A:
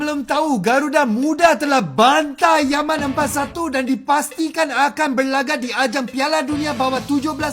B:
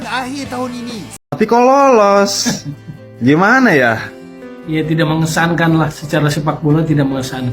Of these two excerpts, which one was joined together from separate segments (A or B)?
B